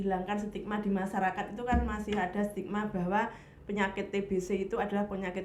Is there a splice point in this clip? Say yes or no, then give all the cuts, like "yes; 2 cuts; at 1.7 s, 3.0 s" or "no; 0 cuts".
no; 0 cuts